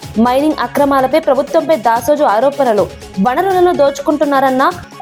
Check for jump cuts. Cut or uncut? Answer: uncut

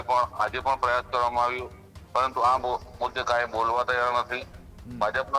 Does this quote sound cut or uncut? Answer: uncut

